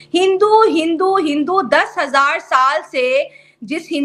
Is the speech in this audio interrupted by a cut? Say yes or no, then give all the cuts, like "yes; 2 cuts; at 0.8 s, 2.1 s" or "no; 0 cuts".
no; 0 cuts